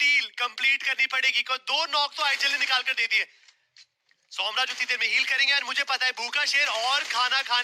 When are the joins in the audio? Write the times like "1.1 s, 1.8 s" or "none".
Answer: none